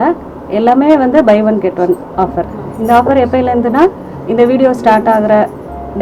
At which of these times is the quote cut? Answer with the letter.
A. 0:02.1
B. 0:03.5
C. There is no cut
C